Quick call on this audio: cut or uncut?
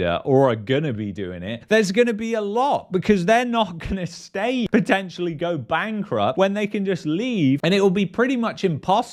uncut